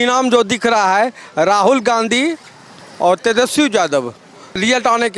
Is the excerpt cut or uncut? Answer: uncut